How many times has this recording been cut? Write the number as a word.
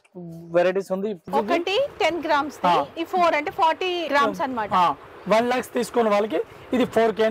one